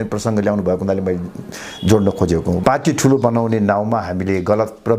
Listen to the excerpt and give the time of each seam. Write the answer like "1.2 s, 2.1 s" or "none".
2.6 s